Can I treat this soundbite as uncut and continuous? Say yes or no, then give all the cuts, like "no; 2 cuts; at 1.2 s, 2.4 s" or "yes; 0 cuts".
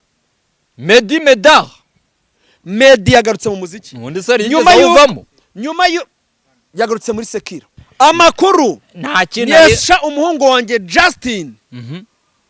no; 1 cut; at 7.8 s